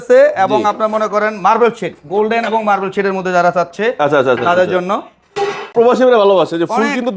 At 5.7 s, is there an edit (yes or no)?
yes